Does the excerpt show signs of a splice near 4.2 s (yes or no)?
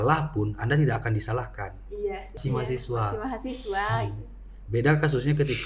no